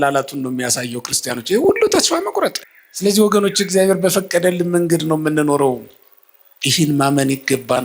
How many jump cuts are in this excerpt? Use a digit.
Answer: 1